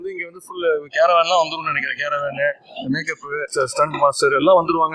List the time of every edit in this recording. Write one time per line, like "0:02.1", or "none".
0:03.5